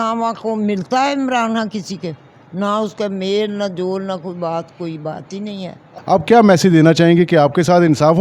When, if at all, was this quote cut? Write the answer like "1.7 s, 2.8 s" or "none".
none